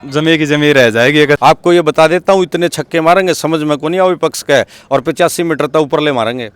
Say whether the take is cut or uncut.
cut